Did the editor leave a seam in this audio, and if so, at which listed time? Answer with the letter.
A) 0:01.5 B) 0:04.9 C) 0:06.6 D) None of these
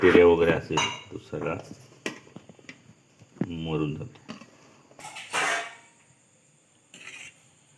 B